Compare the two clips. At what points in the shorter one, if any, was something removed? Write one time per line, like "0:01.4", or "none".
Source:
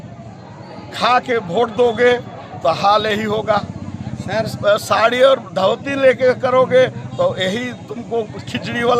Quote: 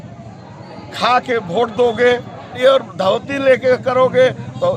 0:02.6